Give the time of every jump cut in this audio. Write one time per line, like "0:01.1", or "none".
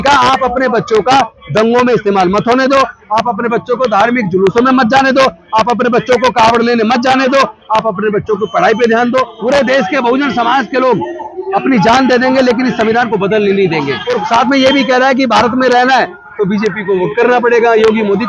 0:09.3
0:14.0